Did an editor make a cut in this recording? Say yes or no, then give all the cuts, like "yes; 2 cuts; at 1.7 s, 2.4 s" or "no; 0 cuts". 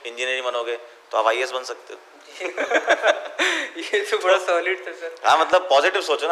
no; 0 cuts